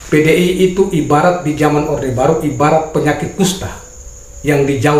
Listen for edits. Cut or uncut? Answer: uncut